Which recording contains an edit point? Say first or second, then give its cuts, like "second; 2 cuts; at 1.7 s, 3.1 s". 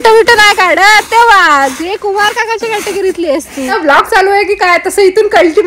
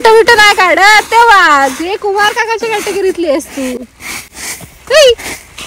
first; 1 cut; at 3.7 s